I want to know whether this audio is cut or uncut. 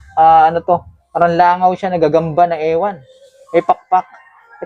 cut